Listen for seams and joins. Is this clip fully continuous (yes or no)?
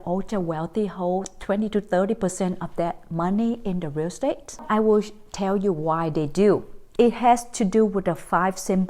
no